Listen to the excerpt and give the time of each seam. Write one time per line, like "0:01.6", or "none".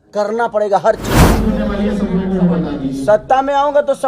0:01.4